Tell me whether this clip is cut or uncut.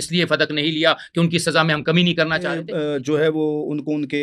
cut